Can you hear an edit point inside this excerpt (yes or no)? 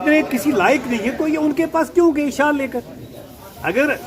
no